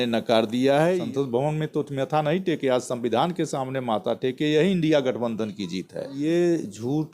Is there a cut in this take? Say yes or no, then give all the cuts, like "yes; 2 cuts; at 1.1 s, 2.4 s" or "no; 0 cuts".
yes; 2 cuts; at 1.0 s, 6.2 s